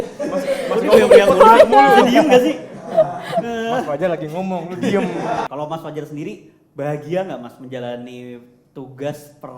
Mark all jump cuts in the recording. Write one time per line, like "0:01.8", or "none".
0:05.5